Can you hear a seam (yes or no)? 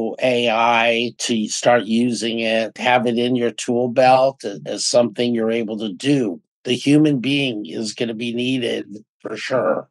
yes